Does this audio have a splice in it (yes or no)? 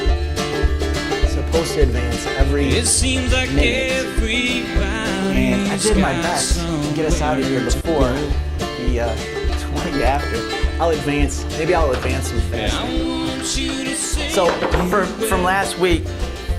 no